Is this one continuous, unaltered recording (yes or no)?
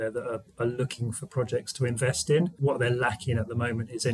no